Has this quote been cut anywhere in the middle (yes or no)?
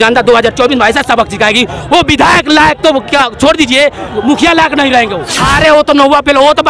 yes